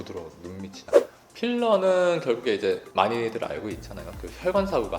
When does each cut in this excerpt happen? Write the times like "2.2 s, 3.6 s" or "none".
1.1 s